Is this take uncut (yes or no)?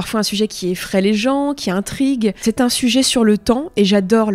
no